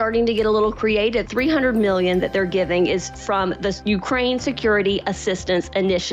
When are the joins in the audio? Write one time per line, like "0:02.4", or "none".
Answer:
0:01.3
0:03.8